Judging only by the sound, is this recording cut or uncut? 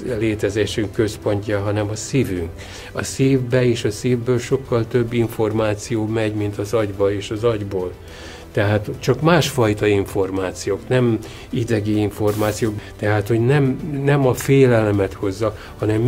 cut